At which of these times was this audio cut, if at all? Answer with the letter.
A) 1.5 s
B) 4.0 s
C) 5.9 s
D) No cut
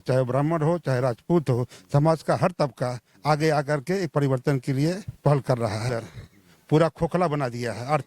C